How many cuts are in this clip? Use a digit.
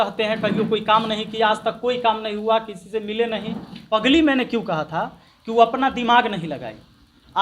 1